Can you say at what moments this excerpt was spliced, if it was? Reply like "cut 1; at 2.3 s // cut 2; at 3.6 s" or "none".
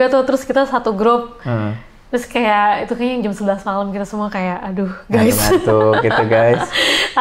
none